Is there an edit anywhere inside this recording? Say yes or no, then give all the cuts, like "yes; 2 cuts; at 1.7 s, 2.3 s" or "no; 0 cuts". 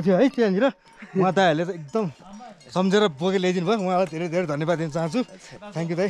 no; 0 cuts